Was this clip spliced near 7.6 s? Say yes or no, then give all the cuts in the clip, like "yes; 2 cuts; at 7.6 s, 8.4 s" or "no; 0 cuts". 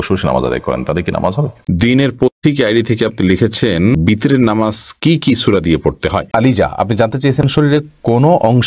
no; 2 cuts; at 1.6 s, 6.3 s